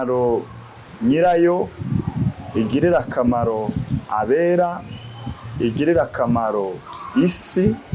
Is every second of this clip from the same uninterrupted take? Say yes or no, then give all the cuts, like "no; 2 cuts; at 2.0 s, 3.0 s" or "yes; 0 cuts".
yes; 0 cuts